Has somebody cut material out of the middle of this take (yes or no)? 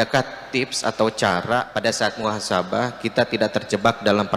yes